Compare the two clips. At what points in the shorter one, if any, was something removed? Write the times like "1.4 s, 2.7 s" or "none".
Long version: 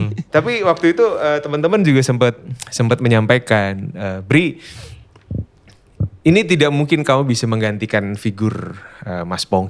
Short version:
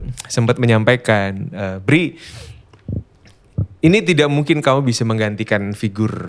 none